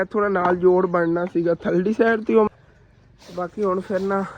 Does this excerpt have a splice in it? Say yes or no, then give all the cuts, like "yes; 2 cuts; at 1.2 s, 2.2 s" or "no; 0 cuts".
yes; 1 cut; at 2.5 s